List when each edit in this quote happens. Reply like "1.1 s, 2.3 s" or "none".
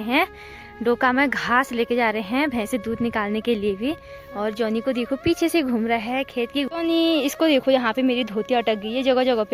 6.7 s